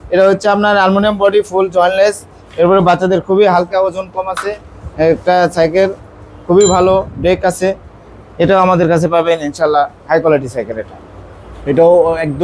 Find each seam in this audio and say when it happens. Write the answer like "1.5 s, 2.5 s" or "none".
none